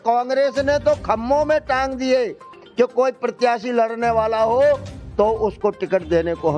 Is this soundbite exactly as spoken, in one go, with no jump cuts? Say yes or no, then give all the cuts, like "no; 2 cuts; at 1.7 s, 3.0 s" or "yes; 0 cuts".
yes; 0 cuts